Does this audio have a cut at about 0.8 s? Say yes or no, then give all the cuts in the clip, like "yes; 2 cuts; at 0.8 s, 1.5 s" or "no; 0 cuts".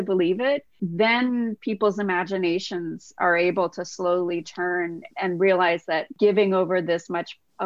yes; 3 cuts; at 0.8 s, 5.1 s, 6.1 s